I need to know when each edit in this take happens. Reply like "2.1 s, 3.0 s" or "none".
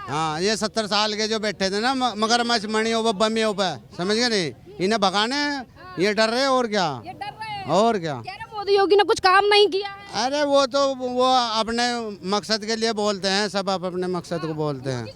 none